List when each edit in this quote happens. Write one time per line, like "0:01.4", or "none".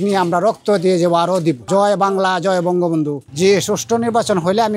0:01.6
0:03.2

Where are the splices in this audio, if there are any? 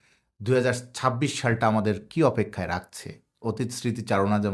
none

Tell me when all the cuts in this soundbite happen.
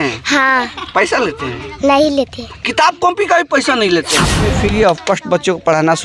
0:04.3

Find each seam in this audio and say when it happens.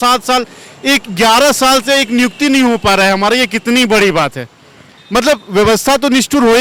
none

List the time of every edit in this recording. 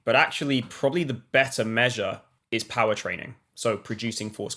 0:02.3

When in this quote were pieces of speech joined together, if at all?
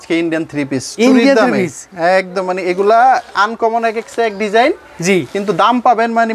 none

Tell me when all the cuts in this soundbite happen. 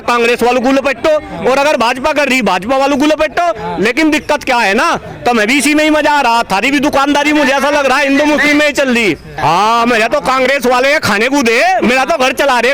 0:09.3

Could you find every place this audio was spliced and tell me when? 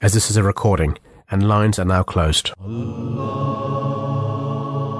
0:02.5

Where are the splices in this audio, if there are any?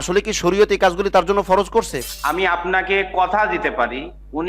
0:02.0

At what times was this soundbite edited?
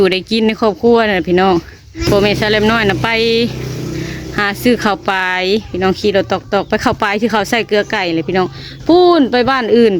0:02.1

